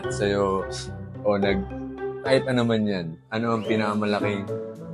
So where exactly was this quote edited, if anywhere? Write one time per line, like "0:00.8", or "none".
none